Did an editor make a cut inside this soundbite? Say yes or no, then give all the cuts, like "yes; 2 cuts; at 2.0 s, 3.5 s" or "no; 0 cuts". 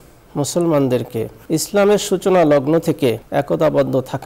yes; 2 cuts; at 1.4 s, 3.2 s